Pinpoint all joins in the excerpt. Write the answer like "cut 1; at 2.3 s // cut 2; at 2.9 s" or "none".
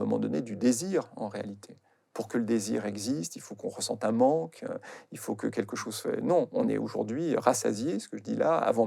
none